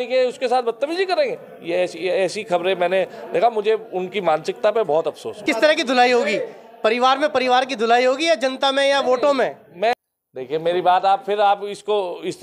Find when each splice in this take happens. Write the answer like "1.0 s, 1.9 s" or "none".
5.4 s, 9.9 s